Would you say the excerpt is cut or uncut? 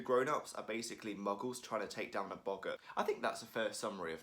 cut